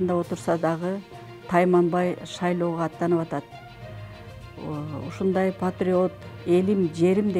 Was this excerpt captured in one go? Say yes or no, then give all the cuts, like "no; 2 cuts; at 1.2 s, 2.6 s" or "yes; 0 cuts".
yes; 0 cuts